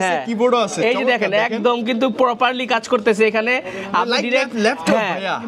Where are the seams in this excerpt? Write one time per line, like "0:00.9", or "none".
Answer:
none